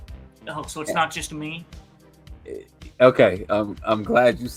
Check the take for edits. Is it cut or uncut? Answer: uncut